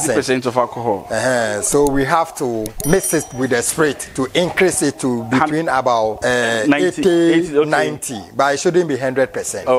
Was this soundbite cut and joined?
yes; 3 cuts; at 1.0 s, 2.8 s, 6.2 s

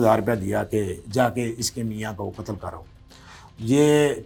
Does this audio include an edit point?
no; 0 cuts

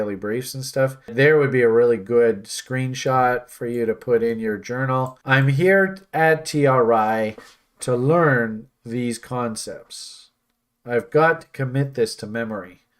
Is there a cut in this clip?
yes; 2 cuts; at 1.1 s, 5.2 s

